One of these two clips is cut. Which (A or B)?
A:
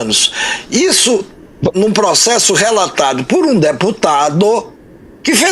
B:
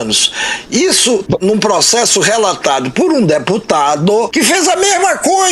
B